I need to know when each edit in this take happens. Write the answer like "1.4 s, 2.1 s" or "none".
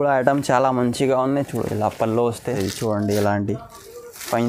2.4 s